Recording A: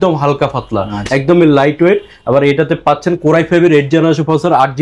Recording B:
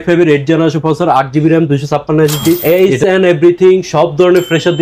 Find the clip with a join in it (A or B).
B